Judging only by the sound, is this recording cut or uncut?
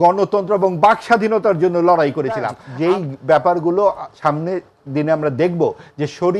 cut